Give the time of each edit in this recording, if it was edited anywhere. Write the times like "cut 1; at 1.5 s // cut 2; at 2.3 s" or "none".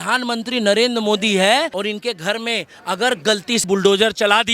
cut 1; at 1.7 s // cut 2; at 3.6 s